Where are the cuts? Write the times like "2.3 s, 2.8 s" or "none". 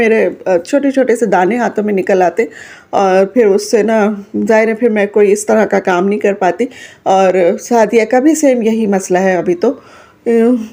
none